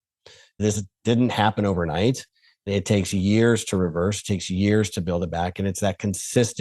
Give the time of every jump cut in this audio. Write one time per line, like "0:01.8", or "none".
0:00.7
0:02.7